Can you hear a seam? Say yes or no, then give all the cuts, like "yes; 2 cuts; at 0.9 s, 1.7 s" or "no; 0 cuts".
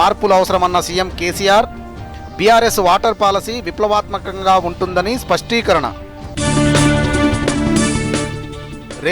yes; 1 cut; at 7.5 s